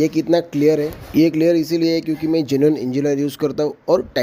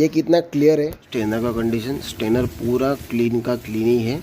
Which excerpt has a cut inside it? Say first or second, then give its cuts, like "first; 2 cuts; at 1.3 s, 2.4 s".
second; 1 cut; at 1.0 s